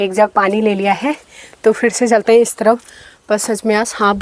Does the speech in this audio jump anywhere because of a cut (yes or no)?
no